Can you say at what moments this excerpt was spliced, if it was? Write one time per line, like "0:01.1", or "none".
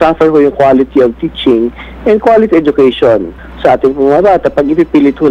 none